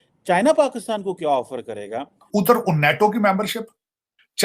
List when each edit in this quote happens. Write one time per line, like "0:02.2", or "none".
0:02.2